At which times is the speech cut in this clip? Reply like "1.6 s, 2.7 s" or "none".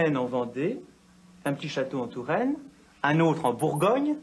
2.8 s